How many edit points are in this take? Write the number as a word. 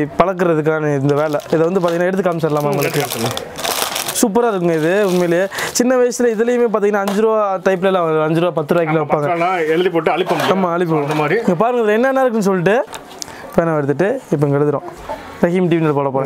one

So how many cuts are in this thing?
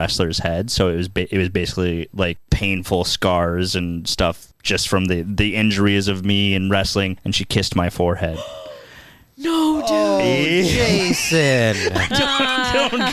zero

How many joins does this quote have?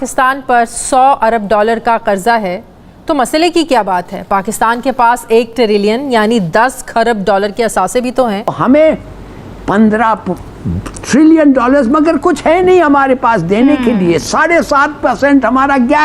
one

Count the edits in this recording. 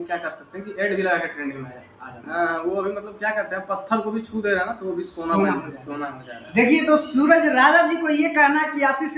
one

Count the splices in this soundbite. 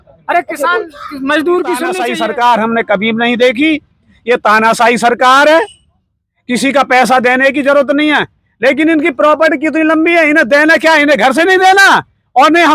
one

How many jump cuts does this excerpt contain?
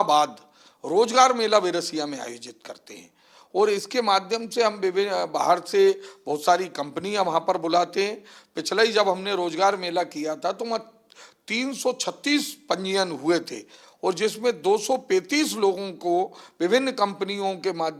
zero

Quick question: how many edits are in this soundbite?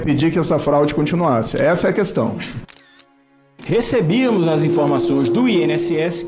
one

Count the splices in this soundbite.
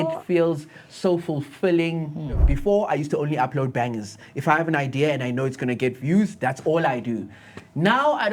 one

